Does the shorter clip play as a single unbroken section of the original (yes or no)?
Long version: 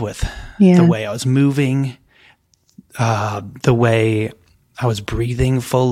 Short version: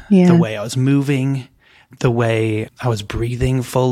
no